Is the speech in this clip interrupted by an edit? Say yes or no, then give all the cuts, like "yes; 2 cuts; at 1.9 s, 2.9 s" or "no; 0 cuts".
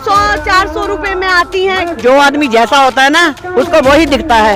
yes; 1 cut; at 2.0 s